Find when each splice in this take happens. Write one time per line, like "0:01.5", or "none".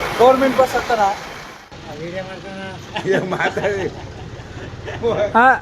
0:01.5